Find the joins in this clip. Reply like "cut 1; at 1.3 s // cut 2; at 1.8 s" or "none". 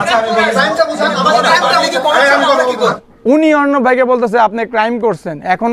cut 1; at 3.1 s